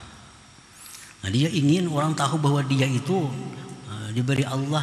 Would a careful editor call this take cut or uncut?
uncut